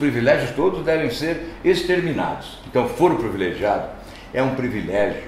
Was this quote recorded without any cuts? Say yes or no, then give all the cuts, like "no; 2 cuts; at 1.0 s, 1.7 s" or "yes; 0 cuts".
yes; 0 cuts